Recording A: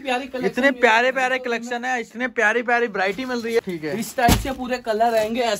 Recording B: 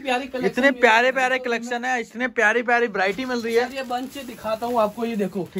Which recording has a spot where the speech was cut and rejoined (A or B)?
A